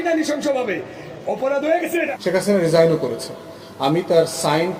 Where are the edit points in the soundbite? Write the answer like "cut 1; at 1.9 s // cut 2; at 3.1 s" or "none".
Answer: cut 1; at 2.1 s